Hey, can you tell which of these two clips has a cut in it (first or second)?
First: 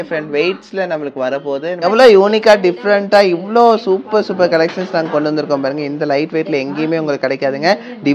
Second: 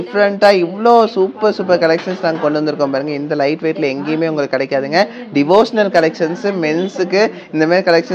first